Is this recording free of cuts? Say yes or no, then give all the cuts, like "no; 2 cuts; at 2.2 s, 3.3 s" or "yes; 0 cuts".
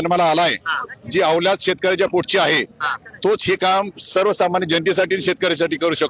yes; 0 cuts